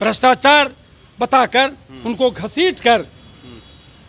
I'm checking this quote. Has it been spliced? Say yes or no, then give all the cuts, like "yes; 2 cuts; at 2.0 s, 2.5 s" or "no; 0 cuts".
no; 0 cuts